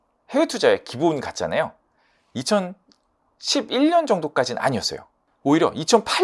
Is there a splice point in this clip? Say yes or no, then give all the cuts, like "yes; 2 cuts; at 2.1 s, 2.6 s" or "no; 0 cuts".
no; 0 cuts